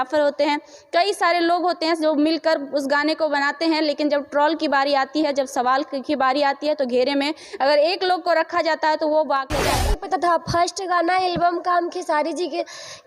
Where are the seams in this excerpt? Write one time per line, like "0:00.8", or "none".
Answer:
0:09.9